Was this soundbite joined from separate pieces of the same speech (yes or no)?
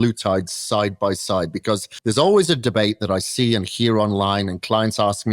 yes